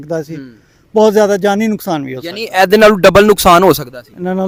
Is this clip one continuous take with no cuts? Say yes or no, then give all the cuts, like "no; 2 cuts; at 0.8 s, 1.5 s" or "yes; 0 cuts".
yes; 0 cuts